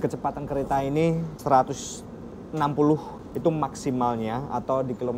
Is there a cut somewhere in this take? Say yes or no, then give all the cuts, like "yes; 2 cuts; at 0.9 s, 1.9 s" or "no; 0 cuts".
yes; 2 cuts; at 1.4 s, 3.1 s